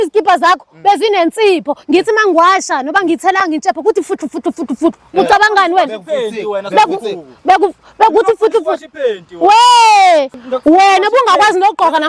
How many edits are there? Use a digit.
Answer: 1